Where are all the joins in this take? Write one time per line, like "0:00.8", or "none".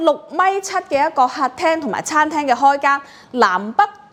none